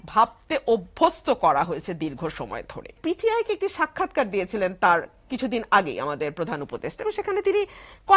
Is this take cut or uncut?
cut